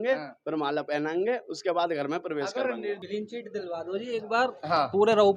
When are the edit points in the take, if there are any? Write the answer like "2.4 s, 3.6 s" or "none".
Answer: 3.0 s